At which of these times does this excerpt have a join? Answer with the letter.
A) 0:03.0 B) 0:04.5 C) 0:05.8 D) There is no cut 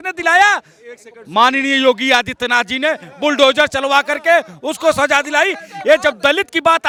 D